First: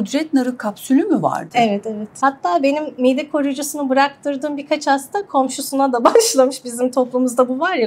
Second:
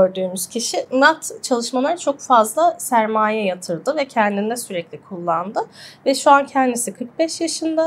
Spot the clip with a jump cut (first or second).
first